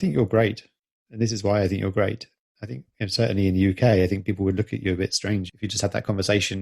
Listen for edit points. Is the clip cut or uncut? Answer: cut